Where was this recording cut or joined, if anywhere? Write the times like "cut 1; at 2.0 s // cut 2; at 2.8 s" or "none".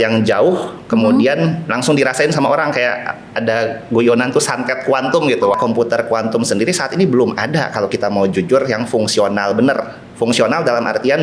cut 1; at 5.5 s